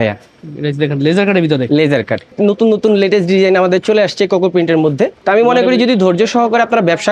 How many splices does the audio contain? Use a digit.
2